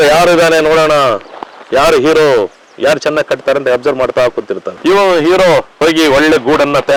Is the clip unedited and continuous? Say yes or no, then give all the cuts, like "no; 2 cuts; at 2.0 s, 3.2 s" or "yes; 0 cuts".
yes; 0 cuts